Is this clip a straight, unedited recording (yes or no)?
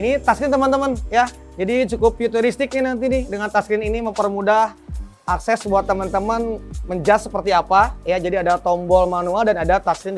yes